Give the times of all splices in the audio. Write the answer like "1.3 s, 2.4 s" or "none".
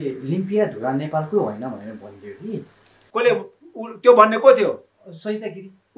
none